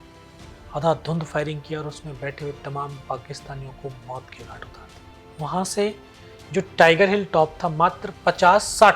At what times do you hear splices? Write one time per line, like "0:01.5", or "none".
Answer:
none